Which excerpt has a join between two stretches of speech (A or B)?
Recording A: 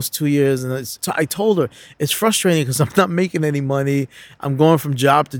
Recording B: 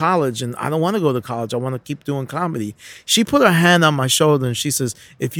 A